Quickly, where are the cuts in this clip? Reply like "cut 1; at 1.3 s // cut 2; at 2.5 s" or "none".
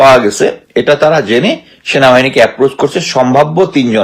none